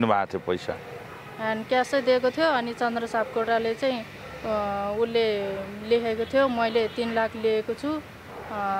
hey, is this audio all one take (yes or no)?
yes